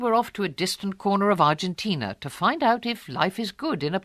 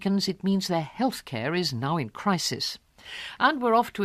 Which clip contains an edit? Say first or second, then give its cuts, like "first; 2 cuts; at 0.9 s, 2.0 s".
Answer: first; 1 cut; at 2.2 s